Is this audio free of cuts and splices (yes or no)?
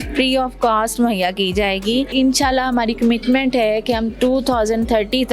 no